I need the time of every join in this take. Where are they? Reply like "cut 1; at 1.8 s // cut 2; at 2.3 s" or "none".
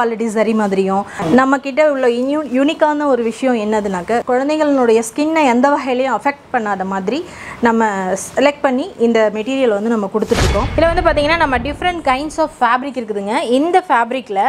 cut 1; at 1.2 s // cut 2; at 4.2 s // cut 3; at 10.7 s